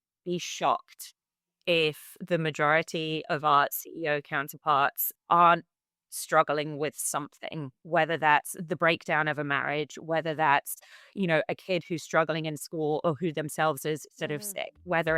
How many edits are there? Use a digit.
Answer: 2